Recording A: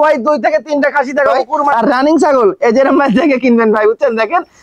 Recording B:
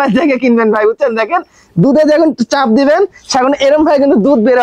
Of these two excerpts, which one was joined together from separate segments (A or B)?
A